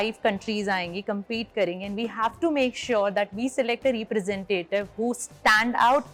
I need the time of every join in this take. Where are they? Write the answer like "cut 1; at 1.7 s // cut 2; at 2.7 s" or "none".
none